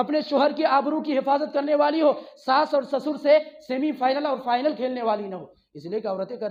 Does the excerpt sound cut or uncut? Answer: uncut